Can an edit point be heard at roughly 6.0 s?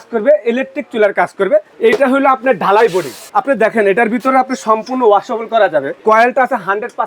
yes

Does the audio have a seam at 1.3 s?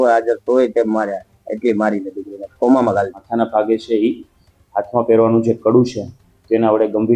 no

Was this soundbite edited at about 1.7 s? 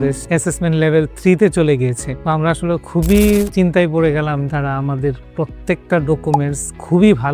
no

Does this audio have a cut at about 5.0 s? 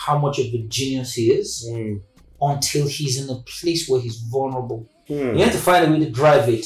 yes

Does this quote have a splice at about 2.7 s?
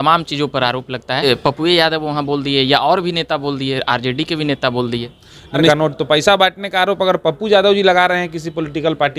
no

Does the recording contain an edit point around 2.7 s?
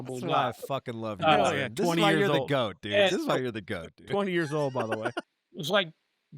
no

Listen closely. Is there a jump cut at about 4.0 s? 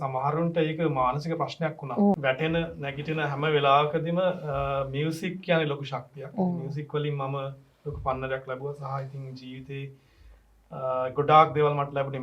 no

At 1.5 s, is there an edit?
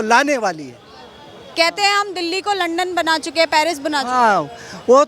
yes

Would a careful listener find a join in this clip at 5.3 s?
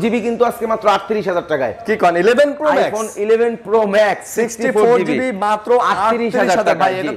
no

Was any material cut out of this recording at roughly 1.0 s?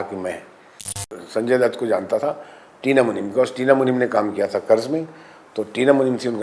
yes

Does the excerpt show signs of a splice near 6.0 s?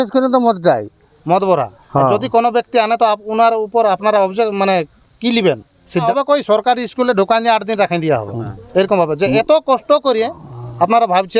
yes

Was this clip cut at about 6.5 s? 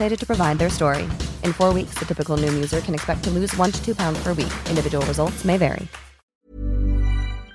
yes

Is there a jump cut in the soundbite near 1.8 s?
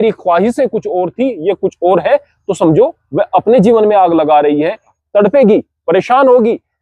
no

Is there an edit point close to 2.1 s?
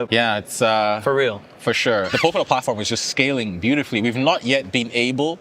yes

